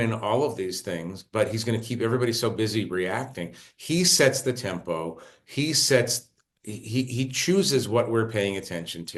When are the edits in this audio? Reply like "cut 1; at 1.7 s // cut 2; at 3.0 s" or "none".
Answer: none